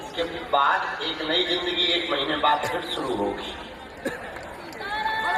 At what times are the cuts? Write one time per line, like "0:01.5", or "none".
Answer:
none